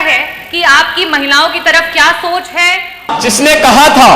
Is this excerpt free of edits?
no; 1 cut; at 3.1 s

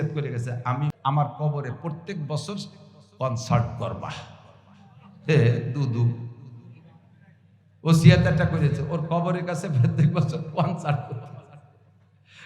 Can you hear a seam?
yes; 1 cut; at 0.9 s

